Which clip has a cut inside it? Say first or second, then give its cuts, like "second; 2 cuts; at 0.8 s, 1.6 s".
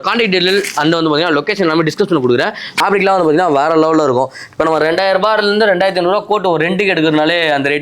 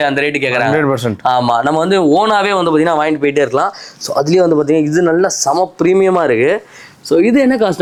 first; 1 cut; at 2.8 s